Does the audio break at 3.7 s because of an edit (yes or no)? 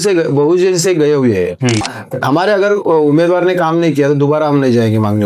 no